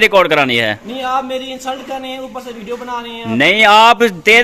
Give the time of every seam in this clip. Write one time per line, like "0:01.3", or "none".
none